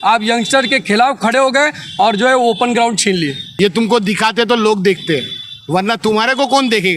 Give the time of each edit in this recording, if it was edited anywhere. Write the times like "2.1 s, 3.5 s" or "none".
3.4 s